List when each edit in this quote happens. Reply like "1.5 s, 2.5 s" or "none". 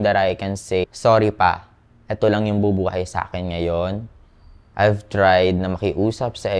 0.9 s